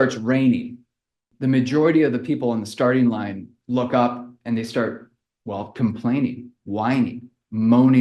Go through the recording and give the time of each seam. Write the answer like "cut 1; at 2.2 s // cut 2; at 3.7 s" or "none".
cut 1; at 1.2 s